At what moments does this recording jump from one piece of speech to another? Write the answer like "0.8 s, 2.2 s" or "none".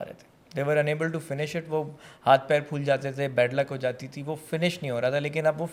none